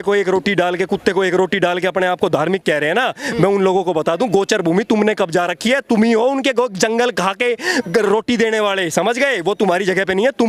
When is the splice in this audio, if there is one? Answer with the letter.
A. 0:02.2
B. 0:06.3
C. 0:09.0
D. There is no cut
D